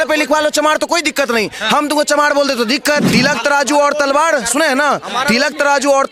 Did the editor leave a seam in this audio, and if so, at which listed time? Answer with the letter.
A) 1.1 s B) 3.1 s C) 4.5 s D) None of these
B